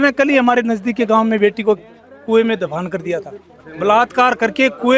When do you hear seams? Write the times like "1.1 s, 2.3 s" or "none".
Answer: none